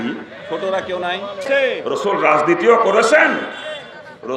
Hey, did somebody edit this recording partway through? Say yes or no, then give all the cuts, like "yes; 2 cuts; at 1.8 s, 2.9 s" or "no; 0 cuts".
yes; 1 cut; at 1.4 s